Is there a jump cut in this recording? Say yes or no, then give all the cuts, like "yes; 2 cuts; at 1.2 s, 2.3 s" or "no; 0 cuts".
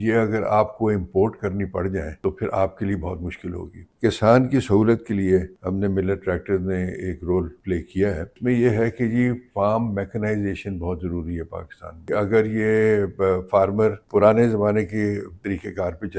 yes; 7 cuts; at 2.1 s, 3.8 s, 5.6 s, 8.0 s, 12.0 s, 14.0 s, 15.3 s